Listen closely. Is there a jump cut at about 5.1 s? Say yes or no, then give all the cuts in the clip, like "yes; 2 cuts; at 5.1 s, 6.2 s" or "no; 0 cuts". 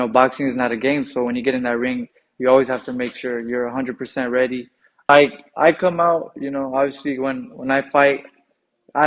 yes; 1 cut; at 5.1 s